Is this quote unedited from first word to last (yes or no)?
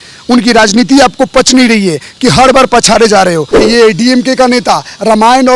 no